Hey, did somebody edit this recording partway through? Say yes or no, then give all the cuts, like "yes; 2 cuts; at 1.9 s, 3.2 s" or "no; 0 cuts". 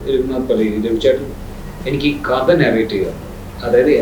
no; 0 cuts